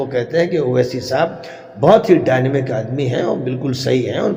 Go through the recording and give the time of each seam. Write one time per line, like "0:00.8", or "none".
none